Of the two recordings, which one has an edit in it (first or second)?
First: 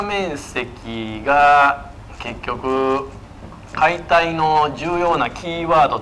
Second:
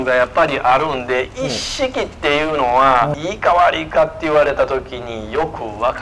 second